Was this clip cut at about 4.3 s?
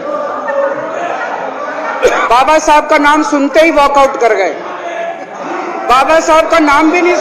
no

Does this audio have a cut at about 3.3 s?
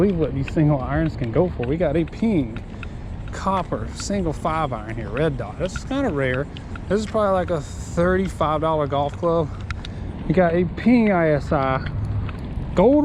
no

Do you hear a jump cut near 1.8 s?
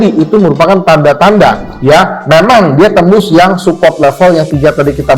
yes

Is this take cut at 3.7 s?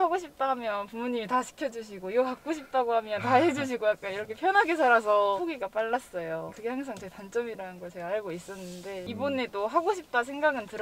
no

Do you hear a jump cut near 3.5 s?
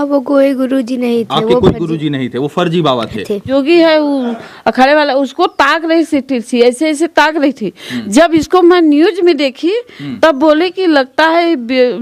yes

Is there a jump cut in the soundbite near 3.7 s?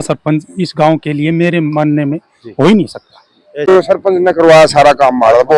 yes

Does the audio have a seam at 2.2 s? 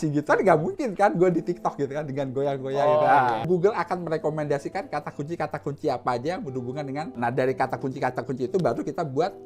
no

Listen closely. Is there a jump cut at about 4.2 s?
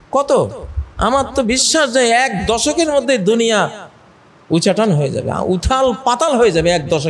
no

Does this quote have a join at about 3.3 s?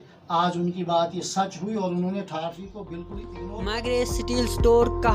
yes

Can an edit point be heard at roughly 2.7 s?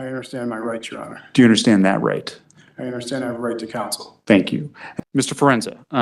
no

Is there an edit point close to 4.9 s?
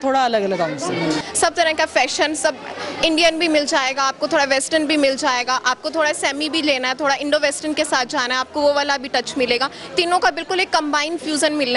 no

